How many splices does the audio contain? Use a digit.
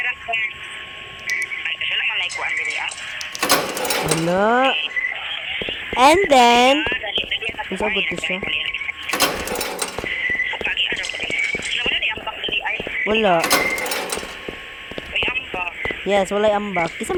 0